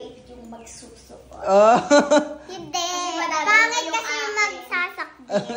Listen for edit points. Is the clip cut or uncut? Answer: uncut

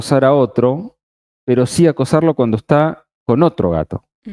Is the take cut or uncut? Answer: uncut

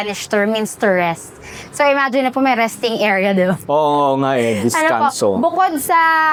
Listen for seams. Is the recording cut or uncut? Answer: uncut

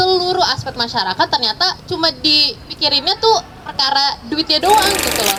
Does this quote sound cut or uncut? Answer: uncut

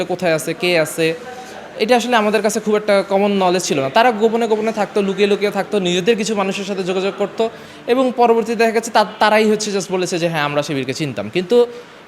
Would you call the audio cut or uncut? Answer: uncut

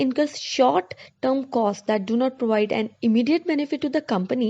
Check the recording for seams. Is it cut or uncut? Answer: cut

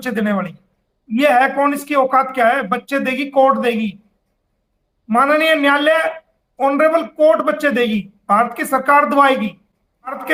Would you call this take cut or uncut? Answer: uncut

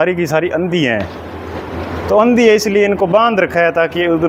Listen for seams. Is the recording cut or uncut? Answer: uncut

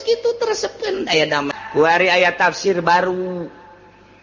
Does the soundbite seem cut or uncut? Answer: cut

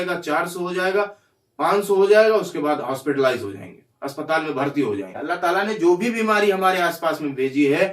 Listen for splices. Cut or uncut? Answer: cut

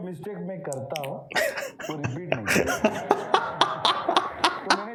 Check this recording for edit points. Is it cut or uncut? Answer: uncut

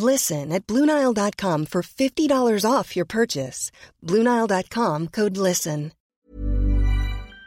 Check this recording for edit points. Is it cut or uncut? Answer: cut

